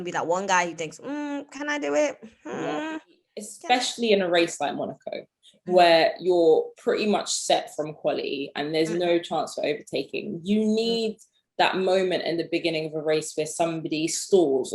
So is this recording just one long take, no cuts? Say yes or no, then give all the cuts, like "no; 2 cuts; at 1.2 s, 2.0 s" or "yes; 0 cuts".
no; 1 cut; at 3.5 s